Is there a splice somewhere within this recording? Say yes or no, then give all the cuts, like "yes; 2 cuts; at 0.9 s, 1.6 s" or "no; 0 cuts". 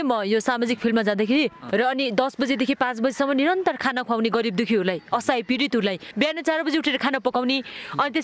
yes; 2 cuts; at 1.6 s, 6.0 s